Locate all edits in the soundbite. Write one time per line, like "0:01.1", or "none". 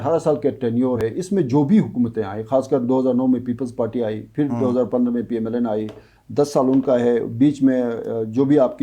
0:01.0